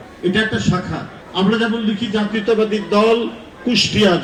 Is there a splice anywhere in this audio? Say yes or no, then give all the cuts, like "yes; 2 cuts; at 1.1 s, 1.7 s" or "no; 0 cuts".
no; 0 cuts